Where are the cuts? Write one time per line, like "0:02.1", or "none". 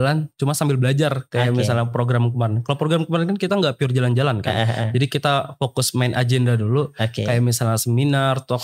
none